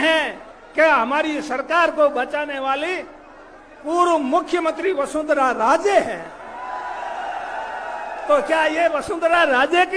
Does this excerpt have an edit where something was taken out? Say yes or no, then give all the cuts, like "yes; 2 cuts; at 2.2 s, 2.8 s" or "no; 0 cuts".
no; 0 cuts